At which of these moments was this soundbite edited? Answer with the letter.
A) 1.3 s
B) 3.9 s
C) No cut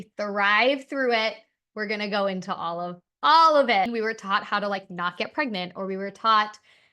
B